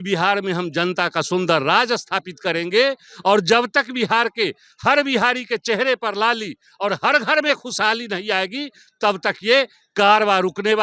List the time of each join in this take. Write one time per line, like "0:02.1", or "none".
none